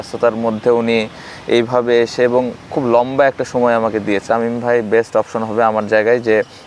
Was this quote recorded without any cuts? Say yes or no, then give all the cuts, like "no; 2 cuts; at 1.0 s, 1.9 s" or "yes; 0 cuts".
no; 1 cut; at 4.2 s